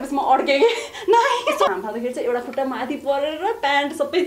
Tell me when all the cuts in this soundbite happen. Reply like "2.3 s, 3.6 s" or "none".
1.7 s

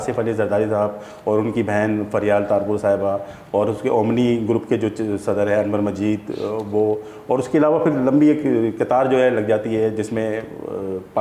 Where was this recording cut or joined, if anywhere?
none

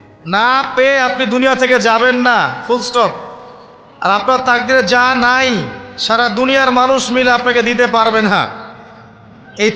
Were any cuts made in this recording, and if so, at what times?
none

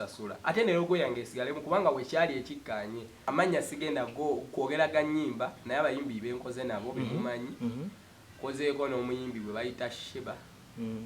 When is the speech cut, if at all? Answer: 3.2 s

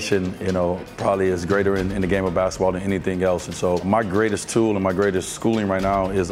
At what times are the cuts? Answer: 3.9 s, 5.3 s

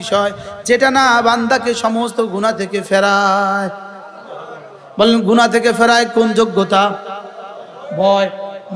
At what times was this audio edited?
none

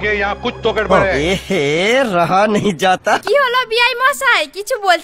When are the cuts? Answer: none

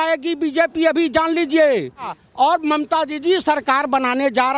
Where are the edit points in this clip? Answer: 2.2 s

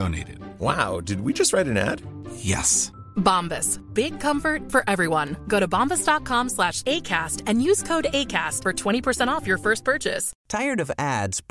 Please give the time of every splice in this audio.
10.3 s

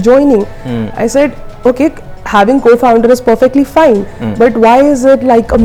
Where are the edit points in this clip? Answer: none

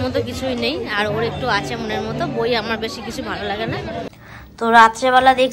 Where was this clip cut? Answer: 4.1 s

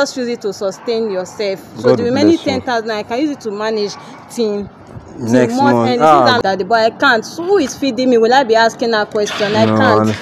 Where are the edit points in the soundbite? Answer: 6.4 s

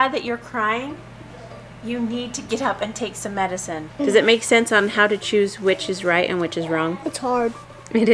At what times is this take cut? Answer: 4.0 s, 7.0 s

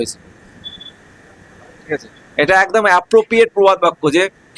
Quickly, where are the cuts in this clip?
none

